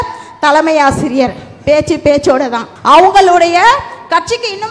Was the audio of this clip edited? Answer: yes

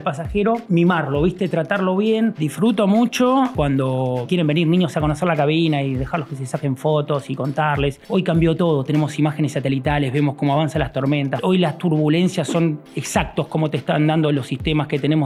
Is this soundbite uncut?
no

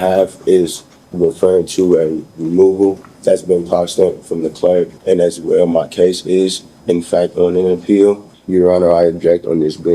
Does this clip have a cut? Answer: yes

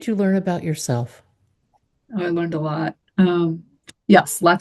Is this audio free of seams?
yes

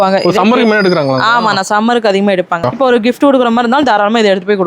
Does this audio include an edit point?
yes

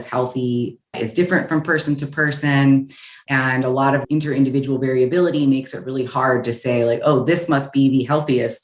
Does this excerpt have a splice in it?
no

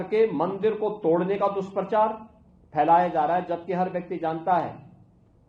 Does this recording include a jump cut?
no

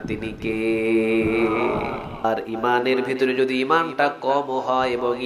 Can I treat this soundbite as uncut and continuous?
no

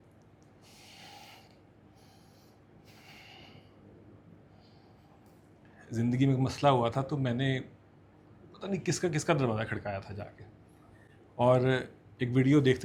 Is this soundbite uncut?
yes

